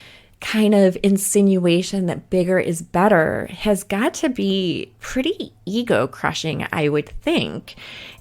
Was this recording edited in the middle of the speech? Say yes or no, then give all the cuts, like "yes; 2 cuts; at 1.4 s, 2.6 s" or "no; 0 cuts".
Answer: yes; 1 cut; at 4.9 s